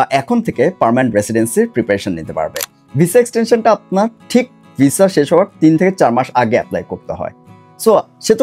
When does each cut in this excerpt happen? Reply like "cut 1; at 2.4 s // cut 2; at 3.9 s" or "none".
cut 1; at 2.7 s